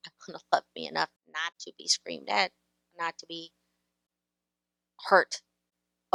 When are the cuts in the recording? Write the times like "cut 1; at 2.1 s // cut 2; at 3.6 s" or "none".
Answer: none